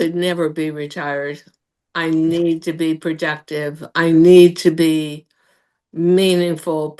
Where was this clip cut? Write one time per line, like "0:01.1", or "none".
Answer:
none